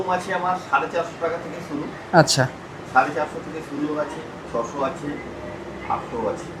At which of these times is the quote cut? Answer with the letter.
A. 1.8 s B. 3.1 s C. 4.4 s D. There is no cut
D